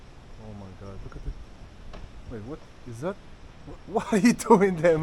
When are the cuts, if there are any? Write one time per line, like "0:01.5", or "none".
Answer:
none